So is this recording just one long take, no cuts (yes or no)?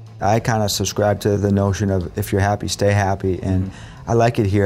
no